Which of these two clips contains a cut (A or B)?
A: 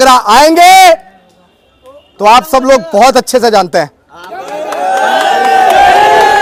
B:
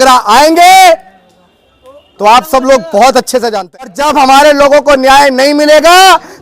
B